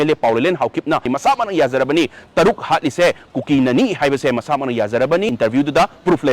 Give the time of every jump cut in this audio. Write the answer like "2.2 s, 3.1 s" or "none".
1.1 s, 5.3 s